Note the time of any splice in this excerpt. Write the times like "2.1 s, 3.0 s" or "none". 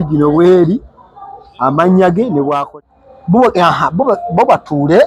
2.7 s